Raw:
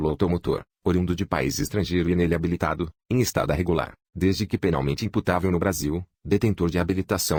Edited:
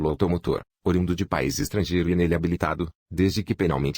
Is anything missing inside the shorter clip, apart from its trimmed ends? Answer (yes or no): yes